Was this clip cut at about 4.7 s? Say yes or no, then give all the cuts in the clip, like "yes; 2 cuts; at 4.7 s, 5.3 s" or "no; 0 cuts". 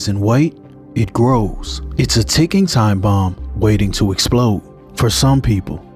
yes; 1 cut; at 4.7 s